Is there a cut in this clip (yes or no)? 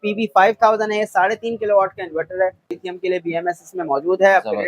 yes